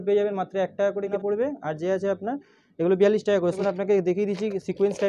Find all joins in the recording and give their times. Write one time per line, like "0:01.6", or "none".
0:01.1
0:03.6

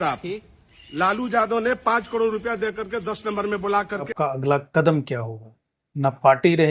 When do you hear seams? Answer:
0:04.1

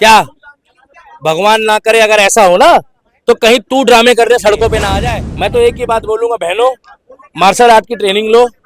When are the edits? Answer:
0:04.9

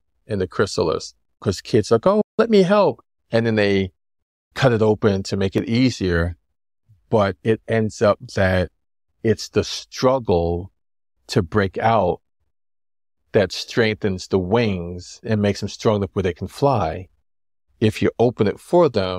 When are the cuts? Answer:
0:01.3

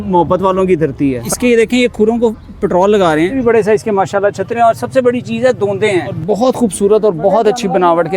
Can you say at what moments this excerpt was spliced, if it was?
0:01.3
0:03.4
0:06.1

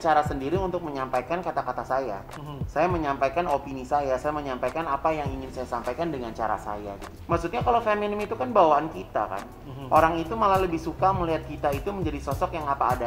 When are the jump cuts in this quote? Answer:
0:07.1

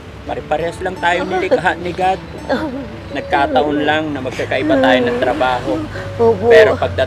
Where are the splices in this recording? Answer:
none

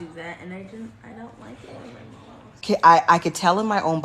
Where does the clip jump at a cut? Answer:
0:02.6

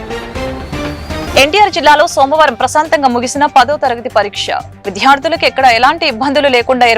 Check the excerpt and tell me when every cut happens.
0:01.2

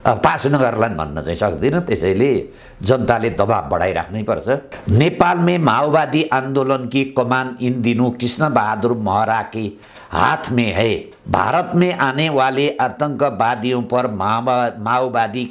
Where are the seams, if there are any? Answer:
0:04.7
0:11.1

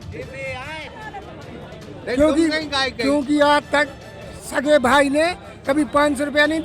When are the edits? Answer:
0:00.9

